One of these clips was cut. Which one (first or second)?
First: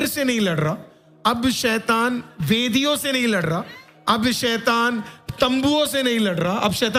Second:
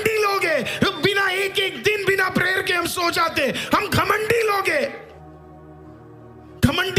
second